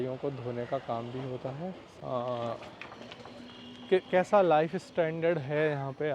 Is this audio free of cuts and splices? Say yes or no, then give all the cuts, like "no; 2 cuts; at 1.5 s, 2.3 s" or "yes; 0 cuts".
no; 1 cut; at 1.9 s